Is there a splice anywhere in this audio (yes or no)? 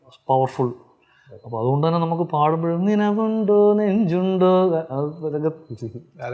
no